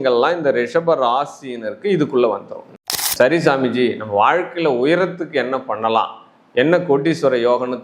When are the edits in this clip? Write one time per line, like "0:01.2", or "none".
0:02.9